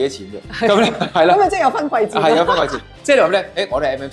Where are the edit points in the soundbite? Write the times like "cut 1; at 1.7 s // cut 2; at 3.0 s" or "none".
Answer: cut 1; at 2.8 s